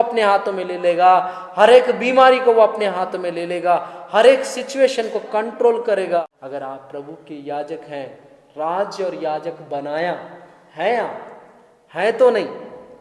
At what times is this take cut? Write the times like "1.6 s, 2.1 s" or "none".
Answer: 6.2 s